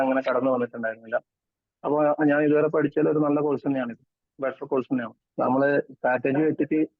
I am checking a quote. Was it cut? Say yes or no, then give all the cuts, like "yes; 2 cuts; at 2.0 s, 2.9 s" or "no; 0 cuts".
yes; 1 cut; at 5.2 s